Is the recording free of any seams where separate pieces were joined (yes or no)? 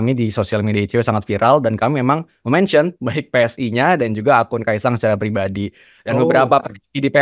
yes